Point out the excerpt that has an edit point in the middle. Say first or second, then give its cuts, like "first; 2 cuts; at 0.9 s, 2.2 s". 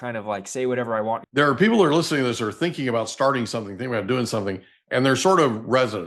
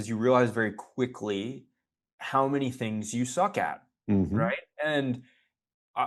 first; 1 cut; at 1.3 s